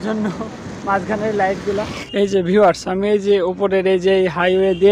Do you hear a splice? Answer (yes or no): yes